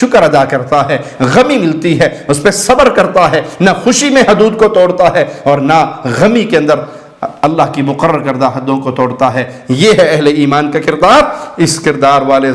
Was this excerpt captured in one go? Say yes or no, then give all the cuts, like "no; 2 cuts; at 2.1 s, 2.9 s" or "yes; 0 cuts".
yes; 0 cuts